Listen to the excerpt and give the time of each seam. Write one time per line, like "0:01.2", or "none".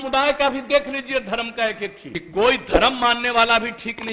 0:02.1